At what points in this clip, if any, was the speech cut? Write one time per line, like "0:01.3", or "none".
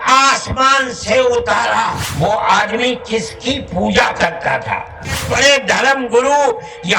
0:02.0
0:05.2

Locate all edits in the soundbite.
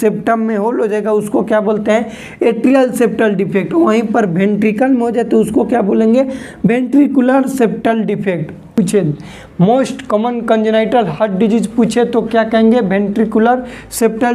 0:08.8

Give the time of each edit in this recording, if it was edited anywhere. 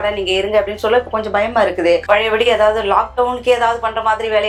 none

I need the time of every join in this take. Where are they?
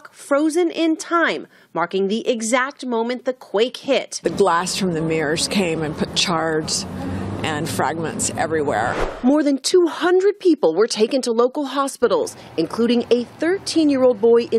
0:01.6

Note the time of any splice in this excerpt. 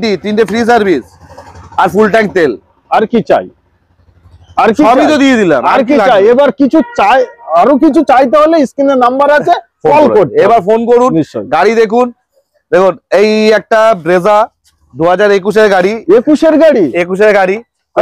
none

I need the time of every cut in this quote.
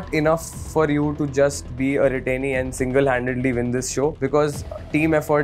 0:04.2

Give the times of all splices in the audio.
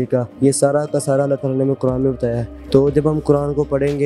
none

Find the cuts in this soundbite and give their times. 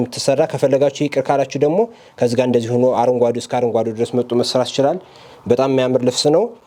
none

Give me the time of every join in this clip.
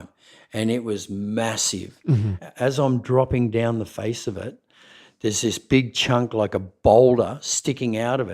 0:02.4

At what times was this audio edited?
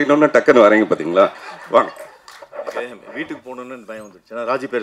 none

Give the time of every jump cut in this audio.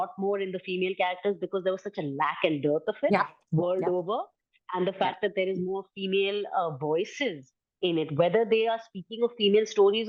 none

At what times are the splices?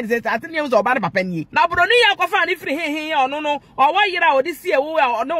0:01.4

